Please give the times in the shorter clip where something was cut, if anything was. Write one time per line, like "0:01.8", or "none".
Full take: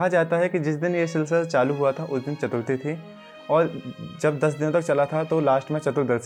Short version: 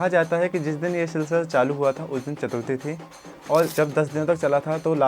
0:03.7

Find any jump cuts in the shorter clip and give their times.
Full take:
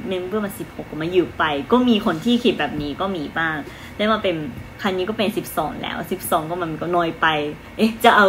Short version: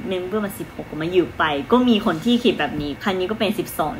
0:02.9

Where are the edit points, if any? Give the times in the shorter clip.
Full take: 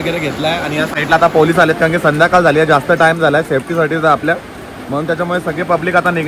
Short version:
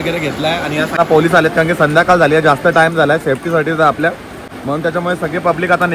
0:01.0

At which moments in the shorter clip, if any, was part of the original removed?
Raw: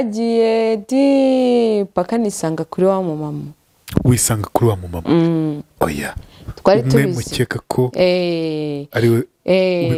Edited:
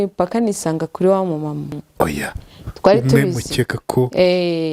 0:01.8

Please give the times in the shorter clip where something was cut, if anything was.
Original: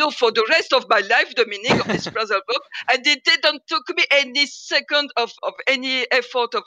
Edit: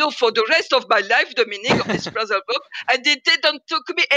none

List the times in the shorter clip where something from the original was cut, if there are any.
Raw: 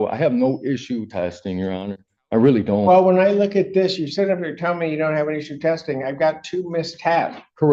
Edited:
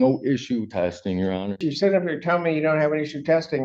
0:01.7

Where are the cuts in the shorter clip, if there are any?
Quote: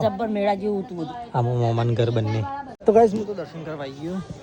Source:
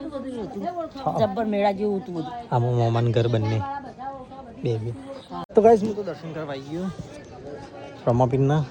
0:02.7

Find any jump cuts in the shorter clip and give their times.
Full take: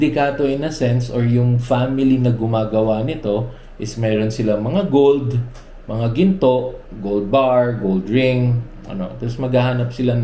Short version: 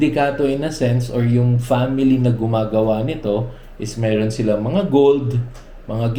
none

